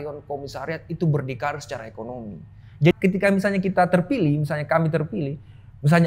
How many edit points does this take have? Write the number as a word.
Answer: one